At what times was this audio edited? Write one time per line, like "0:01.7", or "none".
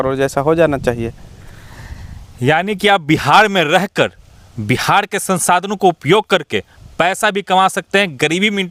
none